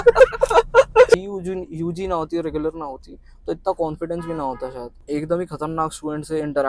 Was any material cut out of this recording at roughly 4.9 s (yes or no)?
yes